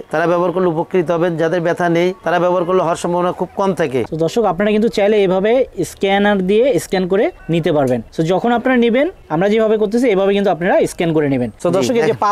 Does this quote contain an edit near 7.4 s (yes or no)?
yes